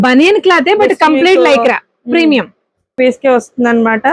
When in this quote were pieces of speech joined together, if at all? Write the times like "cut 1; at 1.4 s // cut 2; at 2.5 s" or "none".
cut 1; at 2.9 s